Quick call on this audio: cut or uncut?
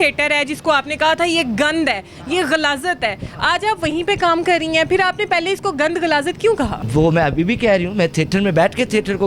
uncut